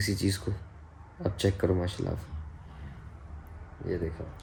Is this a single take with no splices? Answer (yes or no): yes